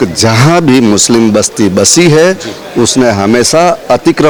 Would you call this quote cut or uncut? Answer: uncut